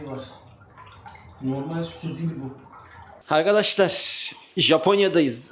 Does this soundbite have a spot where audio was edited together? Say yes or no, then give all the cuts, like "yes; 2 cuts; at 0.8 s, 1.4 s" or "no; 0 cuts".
yes; 1 cut; at 3.2 s